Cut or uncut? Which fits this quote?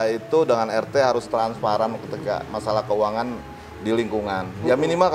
uncut